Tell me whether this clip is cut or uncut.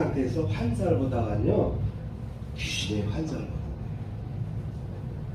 uncut